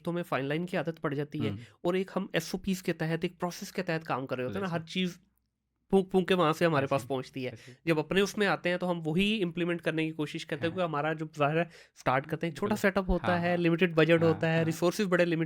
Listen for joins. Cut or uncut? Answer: uncut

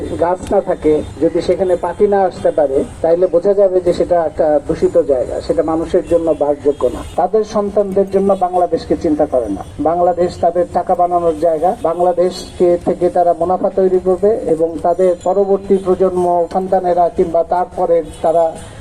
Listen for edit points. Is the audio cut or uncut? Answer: cut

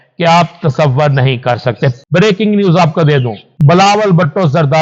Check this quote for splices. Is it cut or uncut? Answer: cut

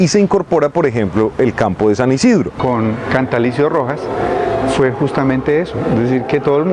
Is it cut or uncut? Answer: cut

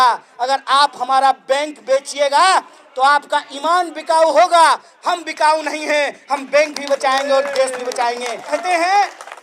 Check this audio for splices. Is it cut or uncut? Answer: cut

